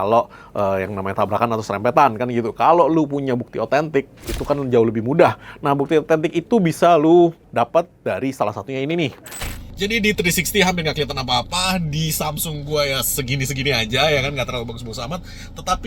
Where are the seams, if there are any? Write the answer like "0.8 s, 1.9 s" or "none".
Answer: 9.4 s